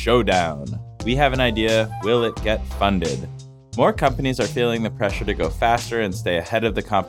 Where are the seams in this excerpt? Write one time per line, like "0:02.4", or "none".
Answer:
none